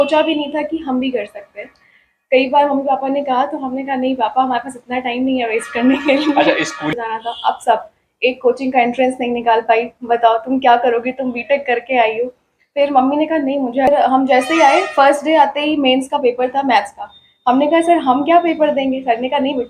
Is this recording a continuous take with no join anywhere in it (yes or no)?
no